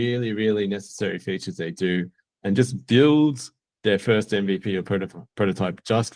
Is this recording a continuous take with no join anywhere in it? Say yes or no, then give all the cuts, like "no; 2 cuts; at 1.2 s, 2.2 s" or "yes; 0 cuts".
yes; 0 cuts